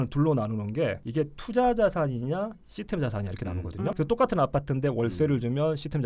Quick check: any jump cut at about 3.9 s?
yes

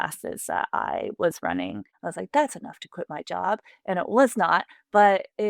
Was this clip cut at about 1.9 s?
yes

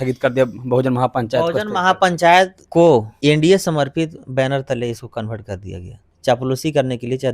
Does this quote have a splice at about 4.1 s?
no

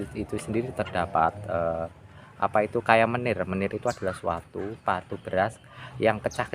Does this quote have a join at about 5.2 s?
yes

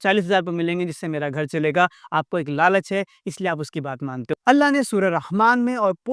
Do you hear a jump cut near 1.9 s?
no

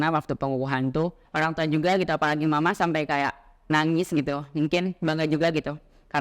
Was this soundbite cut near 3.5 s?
no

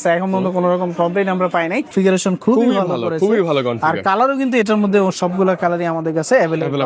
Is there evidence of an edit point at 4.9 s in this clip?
no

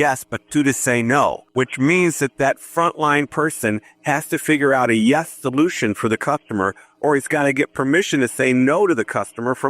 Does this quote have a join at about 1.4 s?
yes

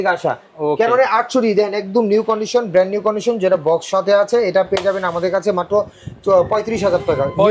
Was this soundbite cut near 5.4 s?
no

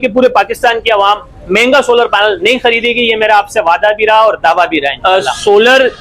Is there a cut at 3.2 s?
no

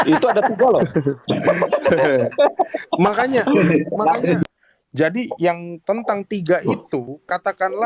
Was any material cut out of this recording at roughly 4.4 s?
yes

